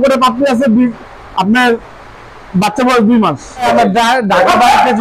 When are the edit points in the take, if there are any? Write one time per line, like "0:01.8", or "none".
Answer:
0:03.7